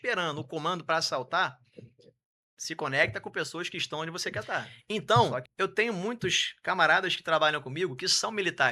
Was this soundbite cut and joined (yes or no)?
yes